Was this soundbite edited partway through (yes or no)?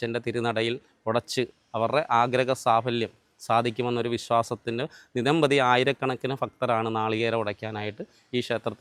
no